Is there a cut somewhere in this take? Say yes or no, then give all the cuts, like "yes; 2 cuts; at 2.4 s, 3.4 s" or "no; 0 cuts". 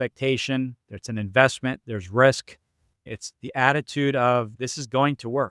yes; 2 cuts; at 3.0 s, 4.5 s